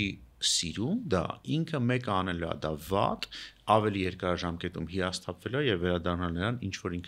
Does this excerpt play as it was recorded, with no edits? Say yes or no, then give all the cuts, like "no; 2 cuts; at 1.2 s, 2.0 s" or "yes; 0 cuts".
yes; 0 cuts